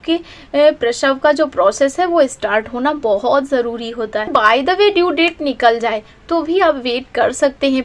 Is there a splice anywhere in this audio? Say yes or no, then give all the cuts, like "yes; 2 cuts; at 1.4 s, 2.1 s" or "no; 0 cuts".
yes; 1 cut; at 4.3 s